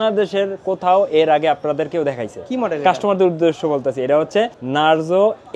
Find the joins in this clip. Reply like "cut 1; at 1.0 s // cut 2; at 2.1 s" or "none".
cut 1; at 4.6 s